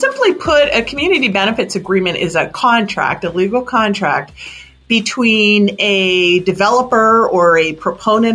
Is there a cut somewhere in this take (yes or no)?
yes